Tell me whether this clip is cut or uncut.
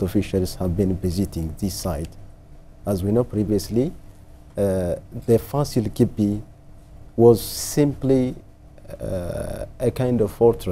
uncut